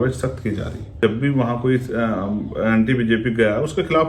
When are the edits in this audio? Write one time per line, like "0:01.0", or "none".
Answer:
0:00.9